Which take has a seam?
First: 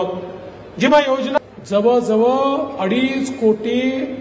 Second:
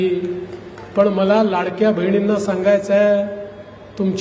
first; 1 cut; at 1.4 s

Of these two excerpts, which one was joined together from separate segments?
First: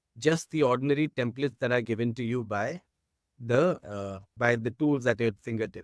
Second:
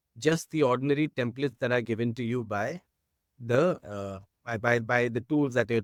first; 1 cut; at 4.6 s

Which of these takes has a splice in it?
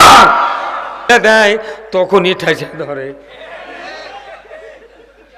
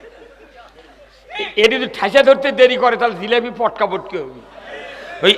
first; 1 cut; at 1.1 s

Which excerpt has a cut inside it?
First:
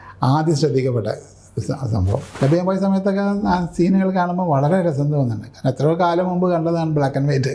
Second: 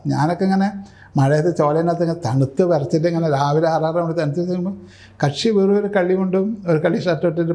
first; 1 cut; at 2.3 s

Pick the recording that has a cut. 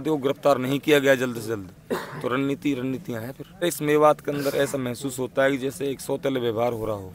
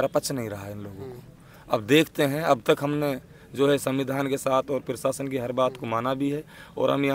first; 1 cut; at 3.6 s

